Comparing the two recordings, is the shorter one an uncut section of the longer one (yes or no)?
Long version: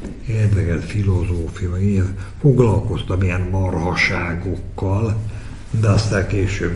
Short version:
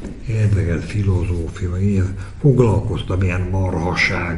yes